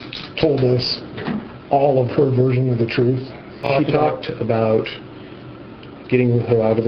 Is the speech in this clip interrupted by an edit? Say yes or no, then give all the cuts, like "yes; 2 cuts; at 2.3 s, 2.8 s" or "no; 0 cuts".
yes; 1 cut; at 3.6 s